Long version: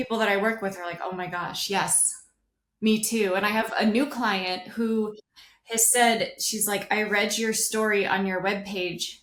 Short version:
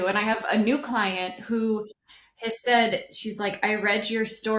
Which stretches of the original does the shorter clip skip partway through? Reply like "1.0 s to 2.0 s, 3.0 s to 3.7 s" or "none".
none